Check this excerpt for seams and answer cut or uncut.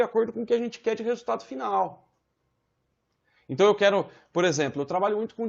uncut